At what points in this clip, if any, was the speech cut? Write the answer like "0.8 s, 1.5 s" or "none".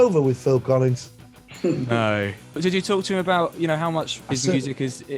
2.6 s, 4.2 s